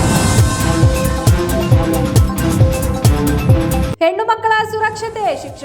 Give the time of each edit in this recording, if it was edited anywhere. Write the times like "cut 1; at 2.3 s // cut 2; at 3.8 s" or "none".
cut 1; at 3.9 s